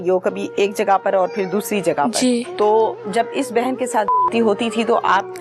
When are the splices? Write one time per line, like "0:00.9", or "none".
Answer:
0:02.5

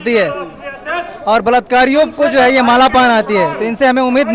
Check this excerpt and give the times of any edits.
none

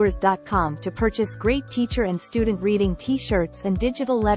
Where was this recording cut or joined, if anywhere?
none

